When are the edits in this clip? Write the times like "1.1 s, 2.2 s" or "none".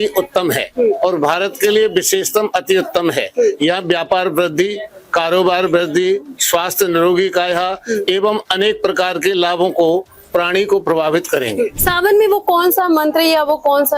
11.8 s